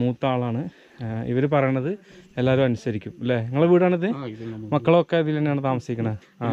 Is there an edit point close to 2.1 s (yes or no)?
no